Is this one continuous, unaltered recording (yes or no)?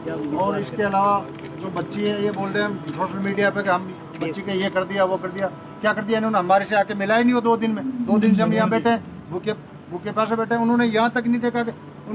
yes